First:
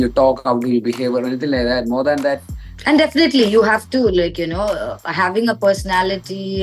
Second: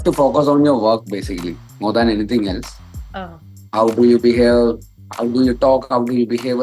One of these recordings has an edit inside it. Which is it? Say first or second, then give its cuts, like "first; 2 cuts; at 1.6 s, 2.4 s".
first; 1 cut; at 2.7 s